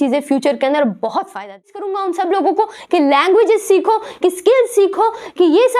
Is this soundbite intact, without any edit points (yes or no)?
no